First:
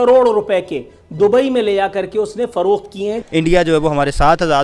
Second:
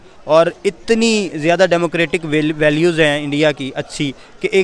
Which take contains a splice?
first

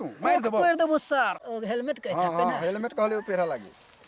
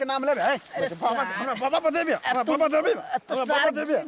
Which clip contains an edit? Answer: first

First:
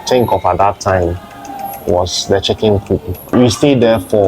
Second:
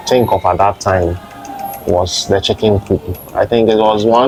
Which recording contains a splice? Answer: first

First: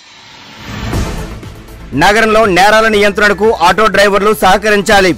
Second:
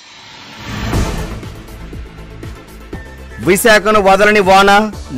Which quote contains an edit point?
second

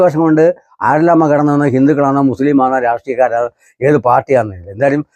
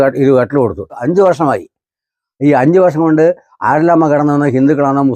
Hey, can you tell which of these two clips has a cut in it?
second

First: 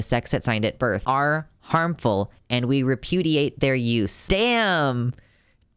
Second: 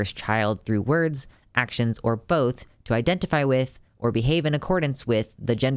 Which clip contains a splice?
first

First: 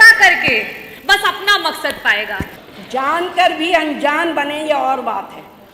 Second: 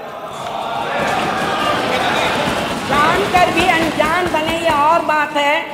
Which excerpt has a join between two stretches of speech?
first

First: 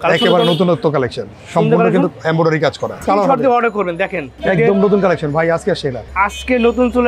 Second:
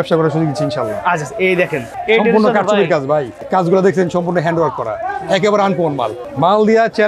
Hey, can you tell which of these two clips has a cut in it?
first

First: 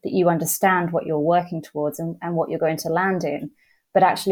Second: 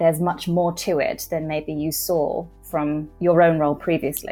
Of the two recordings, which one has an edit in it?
second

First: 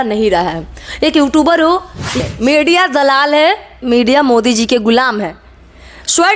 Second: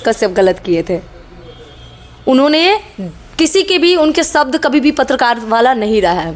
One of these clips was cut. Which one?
first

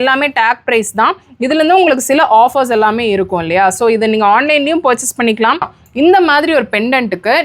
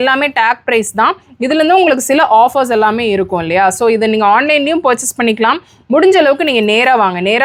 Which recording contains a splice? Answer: first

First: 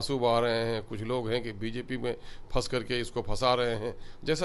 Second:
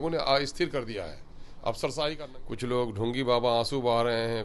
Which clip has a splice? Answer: second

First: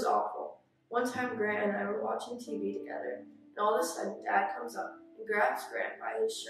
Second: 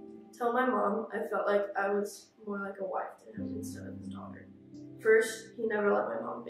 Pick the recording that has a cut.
second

